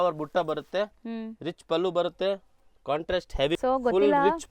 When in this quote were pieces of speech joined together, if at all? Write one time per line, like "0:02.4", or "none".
0:03.6